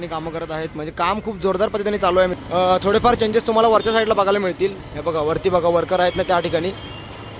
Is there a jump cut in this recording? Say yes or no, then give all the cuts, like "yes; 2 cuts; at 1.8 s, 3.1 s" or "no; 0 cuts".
yes; 1 cut; at 2.3 s